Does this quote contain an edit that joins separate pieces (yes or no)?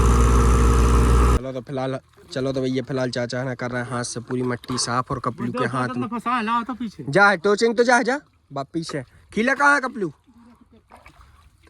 yes